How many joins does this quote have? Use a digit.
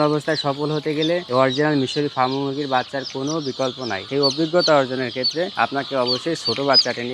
3